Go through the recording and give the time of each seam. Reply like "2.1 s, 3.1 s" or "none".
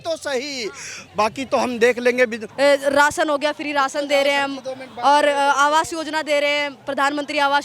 2.4 s